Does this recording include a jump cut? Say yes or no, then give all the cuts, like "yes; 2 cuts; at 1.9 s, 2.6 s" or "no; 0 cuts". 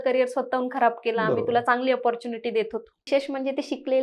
yes; 1 cut; at 3.0 s